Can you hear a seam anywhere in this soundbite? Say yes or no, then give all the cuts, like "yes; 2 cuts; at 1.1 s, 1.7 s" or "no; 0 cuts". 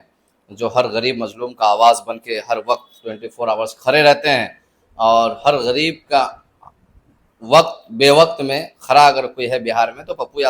no; 0 cuts